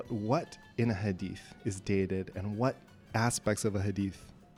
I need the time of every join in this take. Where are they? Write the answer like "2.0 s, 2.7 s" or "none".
none